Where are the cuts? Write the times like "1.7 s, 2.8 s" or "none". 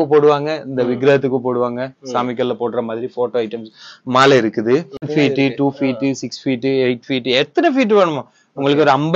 5.1 s